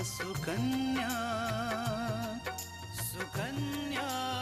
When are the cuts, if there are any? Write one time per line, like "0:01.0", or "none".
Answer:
none

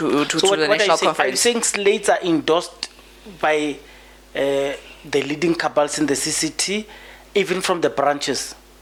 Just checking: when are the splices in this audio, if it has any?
none

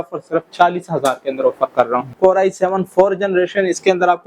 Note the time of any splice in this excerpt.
0:02.0

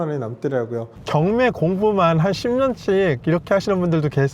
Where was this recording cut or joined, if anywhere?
0:01.0

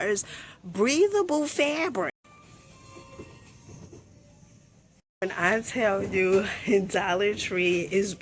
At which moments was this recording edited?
0:02.2
0:05.0

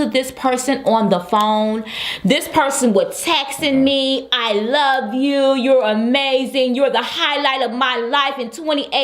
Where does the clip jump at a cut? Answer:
0:01.8

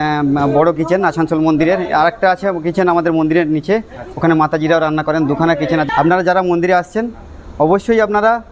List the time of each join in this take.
0:05.9

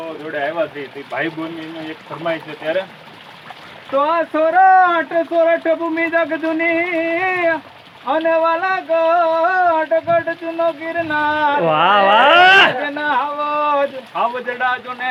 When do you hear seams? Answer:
none

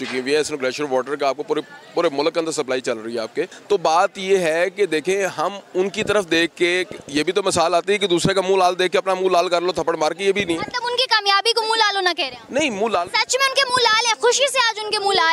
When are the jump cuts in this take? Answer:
0:03.6

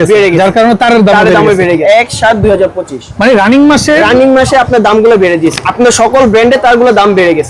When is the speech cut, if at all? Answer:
0:01.8
0:05.6

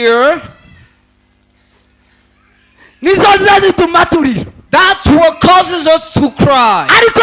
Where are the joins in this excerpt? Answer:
none

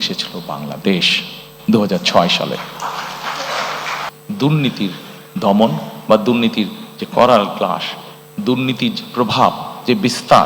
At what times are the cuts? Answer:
0:04.0

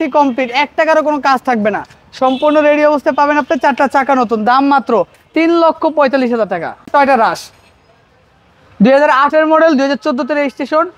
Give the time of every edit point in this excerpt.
0:06.8

